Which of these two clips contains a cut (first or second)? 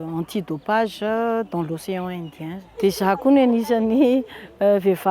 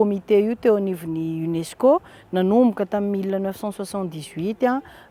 first